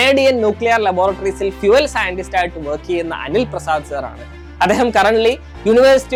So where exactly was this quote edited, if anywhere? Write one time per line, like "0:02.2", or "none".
none